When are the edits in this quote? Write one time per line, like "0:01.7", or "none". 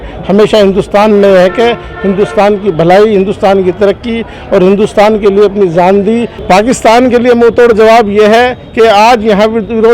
0:06.4